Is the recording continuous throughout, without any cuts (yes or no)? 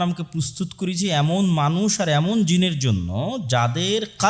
yes